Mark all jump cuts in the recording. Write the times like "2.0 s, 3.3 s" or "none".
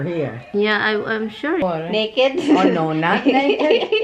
1.6 s